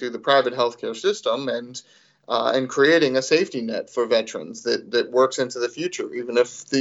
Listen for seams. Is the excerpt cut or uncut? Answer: uncut